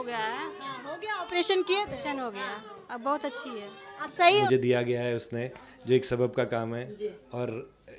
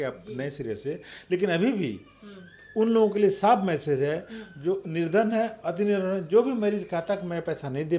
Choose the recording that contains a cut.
first; 1 cut; at 4.4 s

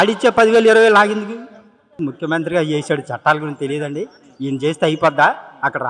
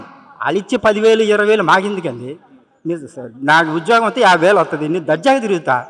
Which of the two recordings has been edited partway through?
first; 1 cut; at 2.0 s

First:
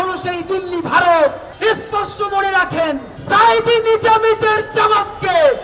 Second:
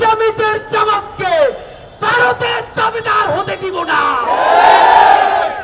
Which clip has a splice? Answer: first; 2 cuts; at 1.5 s, 3.1 s

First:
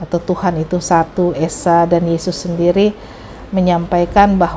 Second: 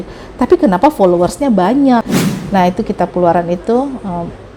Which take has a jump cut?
second; 1 cut; at 2.1 s

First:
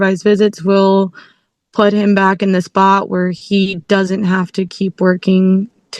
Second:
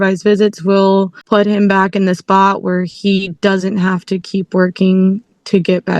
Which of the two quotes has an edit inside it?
second; 1 cut; at 1.2 s

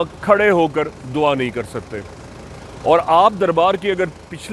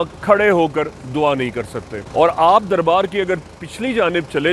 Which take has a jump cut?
second; 1 cut; at 2.0 s

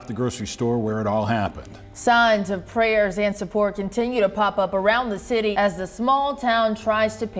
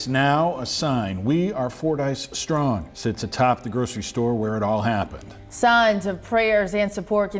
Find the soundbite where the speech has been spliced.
first; 1 cut; at 5.5 s

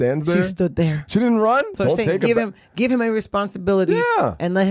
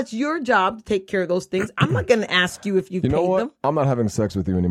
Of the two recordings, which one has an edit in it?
first; 1 cut; at 1.7 s

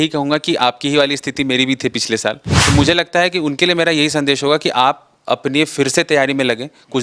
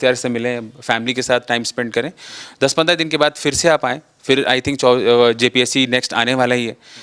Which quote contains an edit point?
first; 1 cut; at 2.5 s

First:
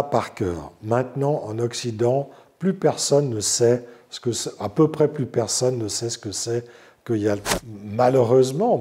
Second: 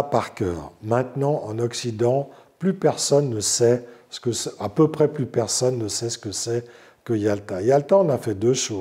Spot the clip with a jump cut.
first; 1 cut; at 7.6 s

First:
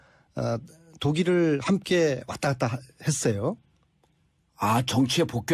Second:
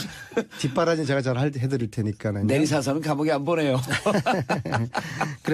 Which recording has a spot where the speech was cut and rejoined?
first; 1 cut; at 2.0 s

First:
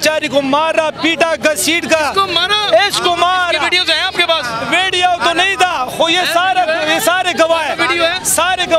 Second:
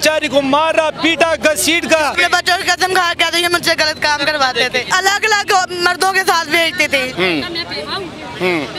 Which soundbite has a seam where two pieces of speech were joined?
second; 3 cuts; at 2.1 s, 4.9 s, 7.1 s

